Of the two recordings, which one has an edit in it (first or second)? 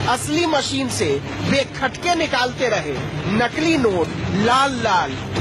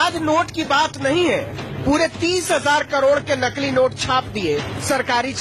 second